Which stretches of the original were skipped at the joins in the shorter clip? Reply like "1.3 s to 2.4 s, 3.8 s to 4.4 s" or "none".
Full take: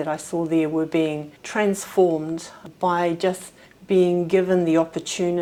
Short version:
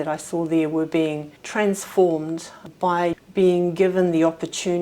3.2 s to 3.7 s